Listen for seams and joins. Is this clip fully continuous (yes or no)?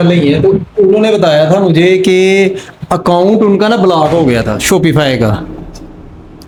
yes